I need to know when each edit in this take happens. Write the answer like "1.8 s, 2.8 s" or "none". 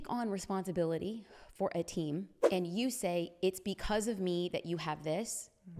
2.4 s